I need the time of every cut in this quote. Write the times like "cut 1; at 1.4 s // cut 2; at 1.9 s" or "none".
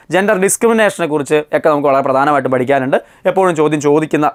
none

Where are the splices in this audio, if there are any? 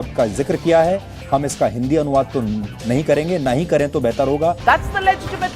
cut 1; at 4.6 s

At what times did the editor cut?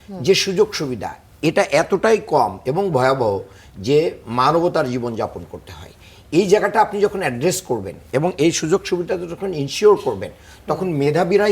none

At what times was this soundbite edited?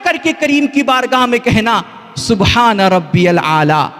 none

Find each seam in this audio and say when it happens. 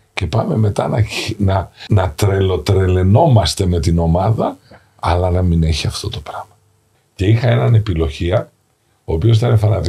cut 1; at 1.8 s // cut 2; at 6.6 s

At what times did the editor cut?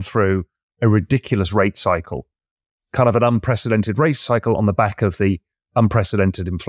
none

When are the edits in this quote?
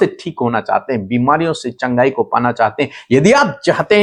none

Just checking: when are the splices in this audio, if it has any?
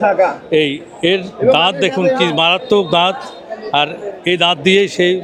none

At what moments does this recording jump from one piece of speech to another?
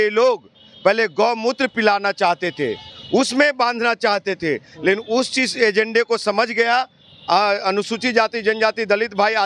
none

